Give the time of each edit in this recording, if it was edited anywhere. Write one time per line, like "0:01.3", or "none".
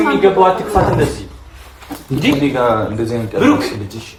none